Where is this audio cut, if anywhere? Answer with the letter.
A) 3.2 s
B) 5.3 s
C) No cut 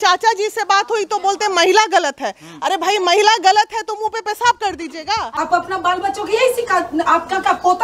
B